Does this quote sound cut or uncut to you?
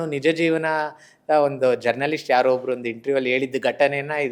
uncut